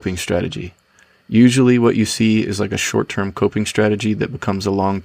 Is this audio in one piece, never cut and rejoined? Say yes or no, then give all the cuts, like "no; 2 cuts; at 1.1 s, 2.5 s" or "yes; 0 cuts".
yes; 0 cuts